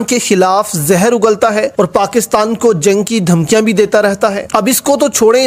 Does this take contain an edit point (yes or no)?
no